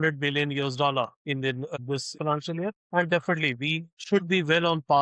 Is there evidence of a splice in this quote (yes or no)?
yes